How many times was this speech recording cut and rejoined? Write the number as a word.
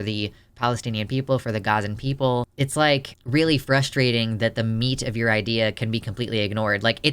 one